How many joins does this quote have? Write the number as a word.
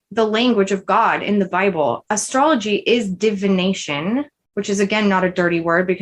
two